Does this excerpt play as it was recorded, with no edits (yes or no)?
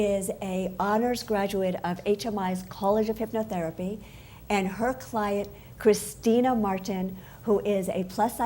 no